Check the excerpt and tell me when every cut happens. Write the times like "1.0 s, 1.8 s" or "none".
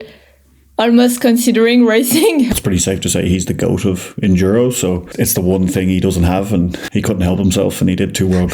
2.5 s, 5.1 s, 6.8 s

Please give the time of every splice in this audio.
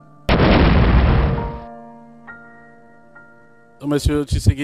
3.6 s

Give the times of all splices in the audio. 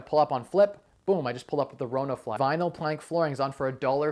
2.4 s

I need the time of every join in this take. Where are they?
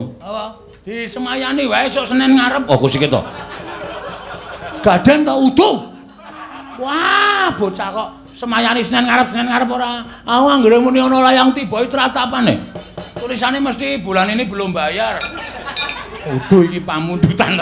none

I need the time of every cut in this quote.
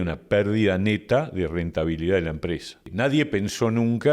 2.8 s

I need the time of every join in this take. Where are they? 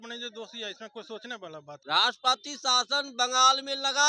1.8 s

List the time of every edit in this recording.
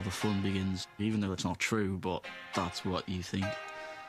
none

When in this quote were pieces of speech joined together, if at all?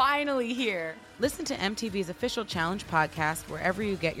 1.0 s

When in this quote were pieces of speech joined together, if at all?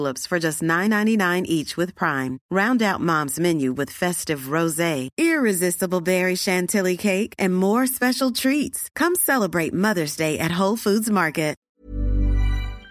11.6 s

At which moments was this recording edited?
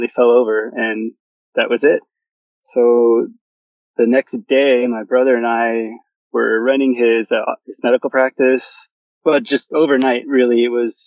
9.0 s

